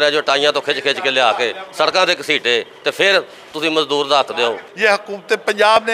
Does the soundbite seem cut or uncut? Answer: cut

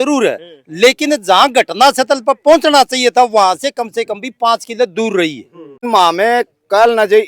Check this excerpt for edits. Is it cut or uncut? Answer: cut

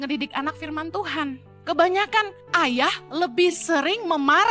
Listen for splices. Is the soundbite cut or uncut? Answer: cut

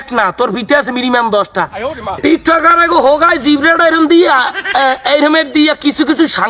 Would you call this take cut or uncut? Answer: cut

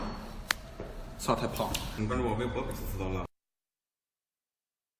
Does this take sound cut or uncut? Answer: uncut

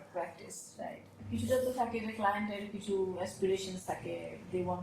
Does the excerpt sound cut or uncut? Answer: cut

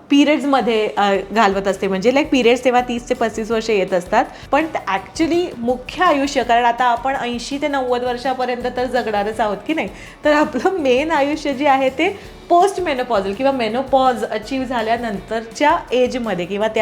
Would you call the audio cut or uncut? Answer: cut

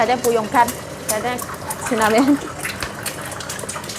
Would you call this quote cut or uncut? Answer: uncut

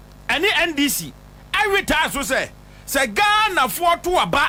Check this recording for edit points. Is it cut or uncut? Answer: uncut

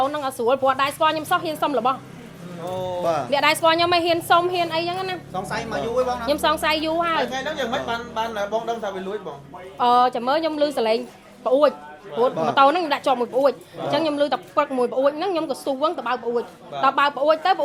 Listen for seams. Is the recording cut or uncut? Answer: uncut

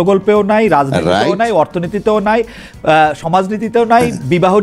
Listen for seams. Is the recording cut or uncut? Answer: uncut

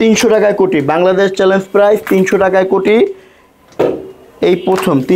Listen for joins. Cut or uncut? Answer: uncut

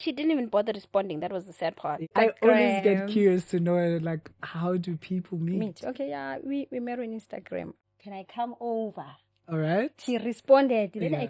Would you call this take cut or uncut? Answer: cut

